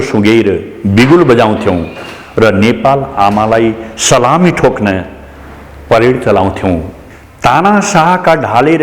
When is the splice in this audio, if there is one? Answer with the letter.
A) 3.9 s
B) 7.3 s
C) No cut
B